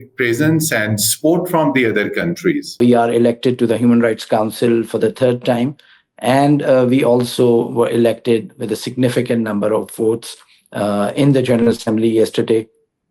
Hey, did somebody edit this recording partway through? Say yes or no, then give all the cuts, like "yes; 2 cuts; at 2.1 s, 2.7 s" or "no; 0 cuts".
yes; 1 cut; at 2.8 s